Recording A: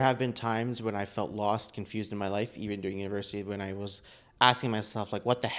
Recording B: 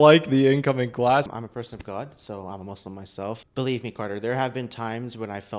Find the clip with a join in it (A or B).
B